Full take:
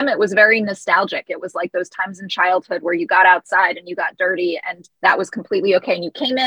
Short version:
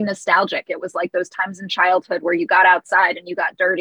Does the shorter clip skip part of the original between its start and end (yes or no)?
no